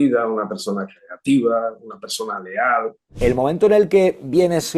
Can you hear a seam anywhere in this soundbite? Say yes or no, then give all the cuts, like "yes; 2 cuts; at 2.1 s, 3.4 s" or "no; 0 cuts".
yes; 1 cut; at 3.1 s